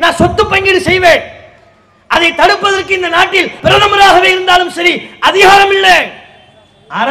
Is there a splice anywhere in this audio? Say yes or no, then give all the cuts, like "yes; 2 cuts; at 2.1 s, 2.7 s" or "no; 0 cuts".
yes; 1 cut; at 3.6 s